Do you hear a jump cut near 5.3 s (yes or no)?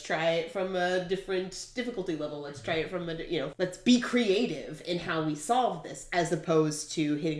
no